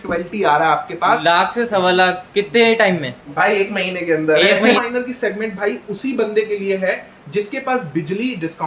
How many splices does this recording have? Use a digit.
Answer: 1